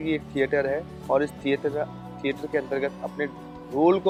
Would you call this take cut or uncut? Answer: uncut